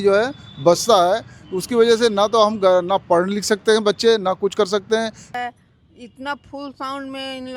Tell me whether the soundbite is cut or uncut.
cut